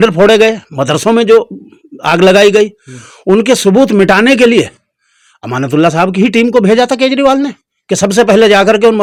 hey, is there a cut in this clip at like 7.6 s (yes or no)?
no